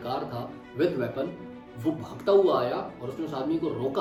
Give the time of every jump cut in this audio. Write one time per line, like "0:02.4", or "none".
none